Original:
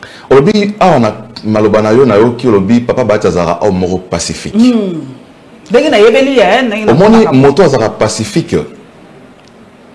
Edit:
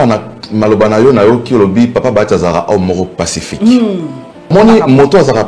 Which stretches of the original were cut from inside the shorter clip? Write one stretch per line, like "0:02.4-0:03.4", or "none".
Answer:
0:05.4-0:07.0